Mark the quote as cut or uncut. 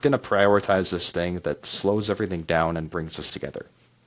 uncut